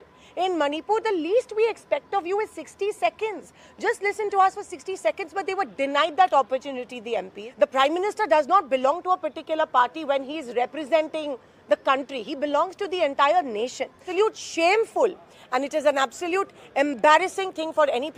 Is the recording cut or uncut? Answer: cut